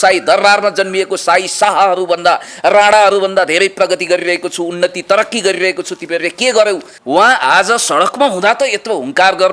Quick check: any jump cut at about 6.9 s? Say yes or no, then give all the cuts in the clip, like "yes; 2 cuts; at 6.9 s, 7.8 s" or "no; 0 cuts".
yes; 1 cut; at 6.9 s